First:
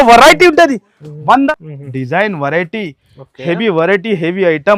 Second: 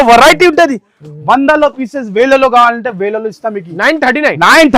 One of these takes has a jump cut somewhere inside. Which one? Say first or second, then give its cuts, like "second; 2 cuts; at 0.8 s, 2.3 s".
first; 1 cut; at 1.5 s